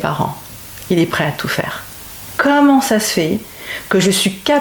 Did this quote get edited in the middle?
yes; 1 cut; at 2.3 s

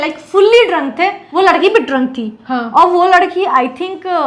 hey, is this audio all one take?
no; 1 cut; at 1.2 s

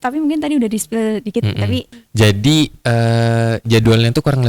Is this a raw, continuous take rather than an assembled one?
no; 1 cut; at 1.9 s

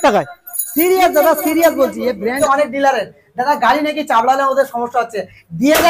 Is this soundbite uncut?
no; 1 cut; at 2.4 s

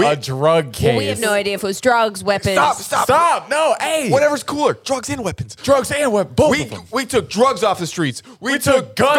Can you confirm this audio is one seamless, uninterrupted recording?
yes; 0 cuts

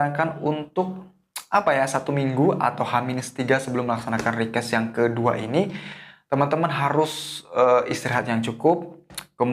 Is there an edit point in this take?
no; 0 cuts

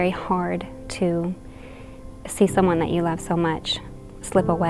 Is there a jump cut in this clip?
no; 0 cuts

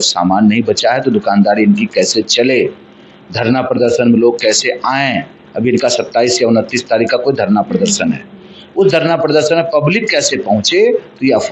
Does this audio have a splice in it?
no; 0 cuts

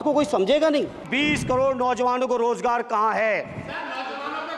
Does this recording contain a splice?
yes; 1 cut; at 1.1 s

